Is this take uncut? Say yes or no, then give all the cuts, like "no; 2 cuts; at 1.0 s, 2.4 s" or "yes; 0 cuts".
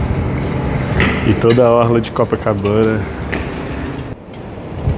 no; 1 cut; at 4.1 s